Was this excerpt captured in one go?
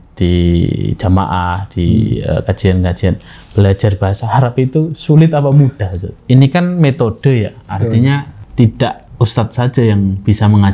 no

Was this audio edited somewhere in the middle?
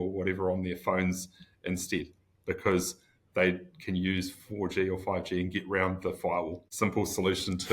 yes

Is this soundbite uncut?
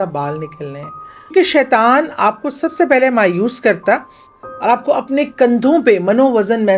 no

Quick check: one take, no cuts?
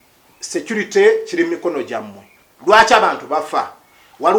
yes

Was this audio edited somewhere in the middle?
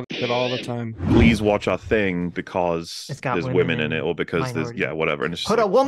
yes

